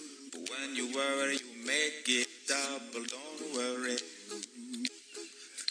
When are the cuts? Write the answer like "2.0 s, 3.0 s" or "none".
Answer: none